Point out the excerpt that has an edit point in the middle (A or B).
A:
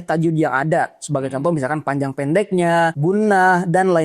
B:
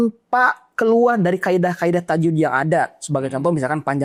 A